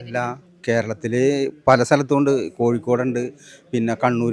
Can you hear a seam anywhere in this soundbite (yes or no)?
no